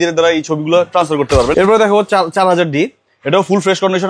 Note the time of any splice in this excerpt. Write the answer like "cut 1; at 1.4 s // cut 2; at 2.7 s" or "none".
cut 1; at 1.5 s